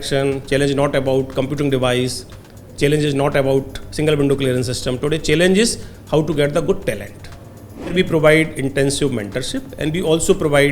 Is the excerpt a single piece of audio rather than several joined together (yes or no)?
no